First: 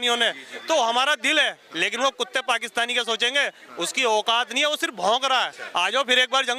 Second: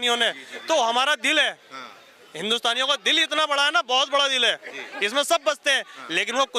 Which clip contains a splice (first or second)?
first